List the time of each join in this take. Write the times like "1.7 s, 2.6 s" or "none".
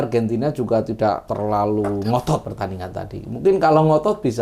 1.3 s, 2.5 s